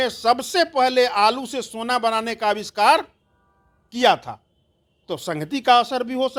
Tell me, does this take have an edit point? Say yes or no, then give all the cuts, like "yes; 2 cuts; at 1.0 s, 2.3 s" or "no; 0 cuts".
no; 0 cuts